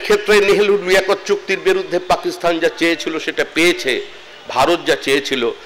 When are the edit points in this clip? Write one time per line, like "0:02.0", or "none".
none